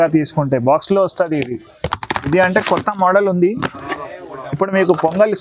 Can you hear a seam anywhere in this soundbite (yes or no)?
no